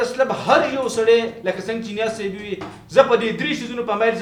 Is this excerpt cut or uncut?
uncut